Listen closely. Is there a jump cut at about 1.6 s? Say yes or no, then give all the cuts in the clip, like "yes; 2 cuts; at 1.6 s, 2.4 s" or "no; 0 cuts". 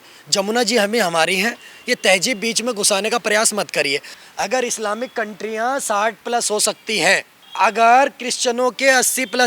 no; 2 cuts; at 4.1 s, 7.4 s